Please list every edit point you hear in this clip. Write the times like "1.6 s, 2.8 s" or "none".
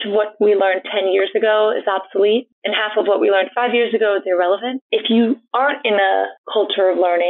4.8 s